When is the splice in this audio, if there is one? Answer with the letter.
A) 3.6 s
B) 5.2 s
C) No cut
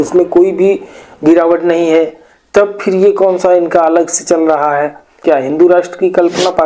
B